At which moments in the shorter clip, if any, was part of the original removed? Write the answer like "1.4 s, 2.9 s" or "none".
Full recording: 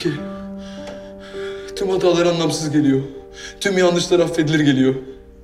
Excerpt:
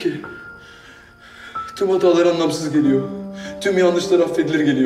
none